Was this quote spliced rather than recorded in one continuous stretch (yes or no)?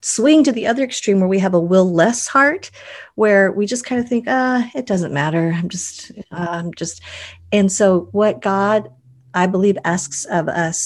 no